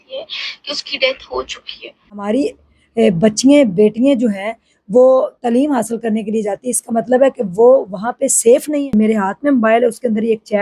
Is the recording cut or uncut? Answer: cut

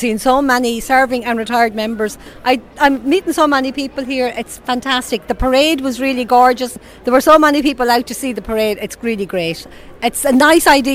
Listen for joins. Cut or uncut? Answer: cut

